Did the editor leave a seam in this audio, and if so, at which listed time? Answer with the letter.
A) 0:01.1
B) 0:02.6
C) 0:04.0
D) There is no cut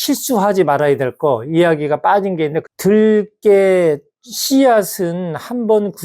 B